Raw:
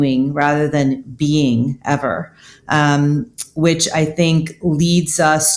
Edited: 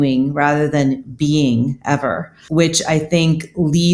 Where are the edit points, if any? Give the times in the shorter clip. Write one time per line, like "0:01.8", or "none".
0:02.3